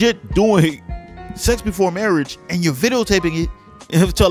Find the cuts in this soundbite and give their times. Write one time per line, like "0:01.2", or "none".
none